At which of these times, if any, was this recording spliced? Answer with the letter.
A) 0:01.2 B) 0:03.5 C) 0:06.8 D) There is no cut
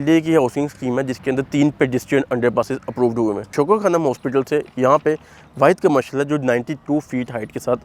B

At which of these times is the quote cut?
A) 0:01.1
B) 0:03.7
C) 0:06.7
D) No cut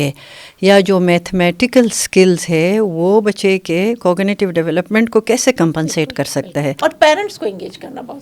C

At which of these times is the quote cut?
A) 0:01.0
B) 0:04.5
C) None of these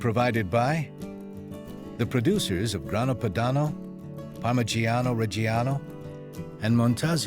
A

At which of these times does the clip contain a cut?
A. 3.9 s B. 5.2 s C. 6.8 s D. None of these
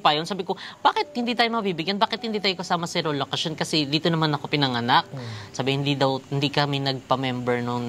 D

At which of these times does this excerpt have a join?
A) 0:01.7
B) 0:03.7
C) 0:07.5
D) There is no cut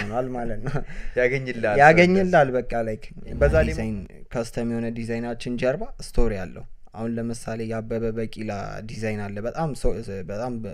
B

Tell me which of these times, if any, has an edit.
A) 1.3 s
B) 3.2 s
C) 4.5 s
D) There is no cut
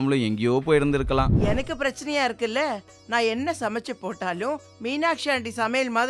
A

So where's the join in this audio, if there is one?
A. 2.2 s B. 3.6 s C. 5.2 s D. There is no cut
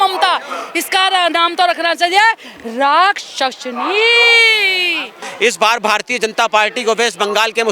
C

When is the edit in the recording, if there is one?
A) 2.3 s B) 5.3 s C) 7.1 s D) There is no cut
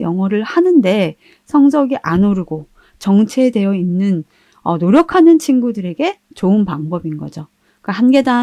D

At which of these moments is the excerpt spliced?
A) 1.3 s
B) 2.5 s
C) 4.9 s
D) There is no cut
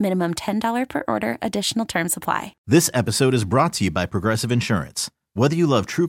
B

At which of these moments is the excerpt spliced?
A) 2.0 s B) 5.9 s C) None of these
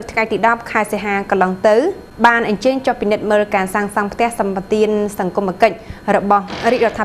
A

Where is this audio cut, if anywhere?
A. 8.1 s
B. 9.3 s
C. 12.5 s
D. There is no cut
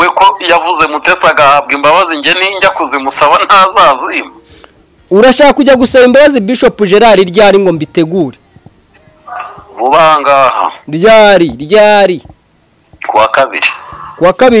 D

